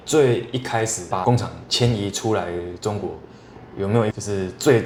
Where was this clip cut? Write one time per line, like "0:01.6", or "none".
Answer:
none